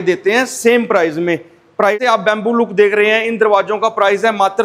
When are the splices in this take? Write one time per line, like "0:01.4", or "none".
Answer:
0:01.9